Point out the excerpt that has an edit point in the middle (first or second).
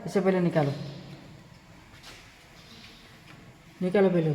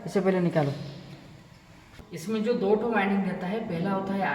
second